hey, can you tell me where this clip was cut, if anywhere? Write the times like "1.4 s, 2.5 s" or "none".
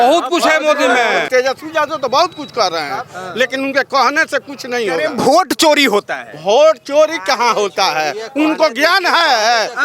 1.3 s